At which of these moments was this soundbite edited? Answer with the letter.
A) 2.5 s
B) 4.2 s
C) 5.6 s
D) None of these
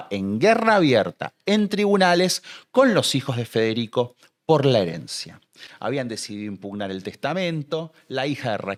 D